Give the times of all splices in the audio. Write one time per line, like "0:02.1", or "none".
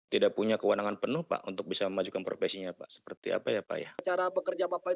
0:04.0